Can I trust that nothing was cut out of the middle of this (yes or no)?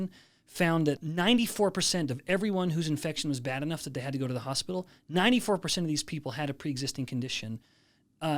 no